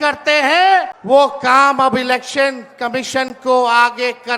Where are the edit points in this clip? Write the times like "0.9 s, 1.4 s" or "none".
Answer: 0.9 s